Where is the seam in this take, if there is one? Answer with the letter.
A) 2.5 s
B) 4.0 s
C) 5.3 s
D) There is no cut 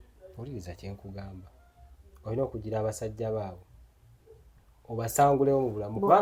D